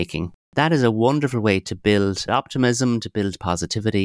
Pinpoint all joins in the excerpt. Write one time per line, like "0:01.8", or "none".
0:02.2